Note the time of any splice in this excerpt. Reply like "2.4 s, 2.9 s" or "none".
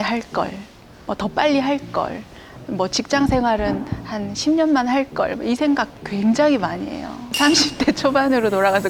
none